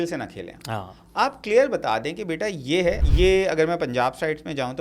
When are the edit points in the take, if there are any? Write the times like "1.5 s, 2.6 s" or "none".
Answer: 3.0 s